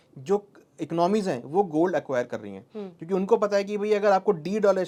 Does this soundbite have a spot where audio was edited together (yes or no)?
no